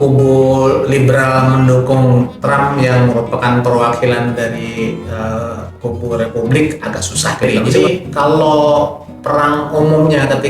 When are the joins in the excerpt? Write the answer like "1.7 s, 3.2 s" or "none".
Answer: 7.4 s